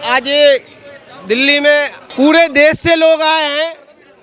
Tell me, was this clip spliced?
yes; 1 cut; at 2.0 s

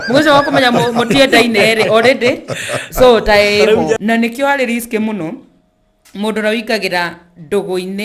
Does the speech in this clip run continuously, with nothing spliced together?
no; 1 cut; at 4.0 s

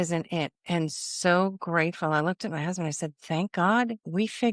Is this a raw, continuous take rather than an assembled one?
yes; 0 cuts

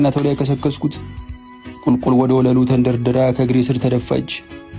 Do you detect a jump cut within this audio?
no; 0 cuts

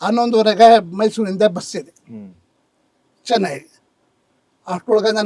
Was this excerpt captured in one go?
yes; 0 cuts

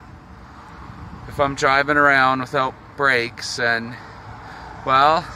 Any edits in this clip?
no; 0 cuts

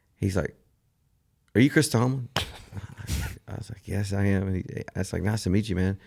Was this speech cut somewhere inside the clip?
no; 0 cuts

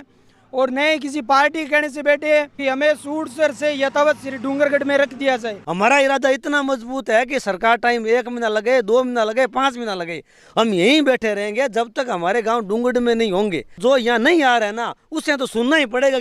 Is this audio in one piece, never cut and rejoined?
no; 3 cuts; at 2.5 s, 5.6 s, 13.8 s

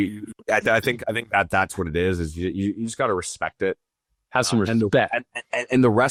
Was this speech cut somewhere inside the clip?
no; 0 cuts

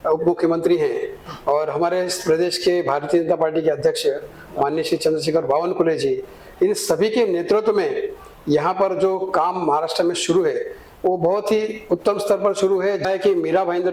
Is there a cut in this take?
yes; 1 cut; at 13.0 s

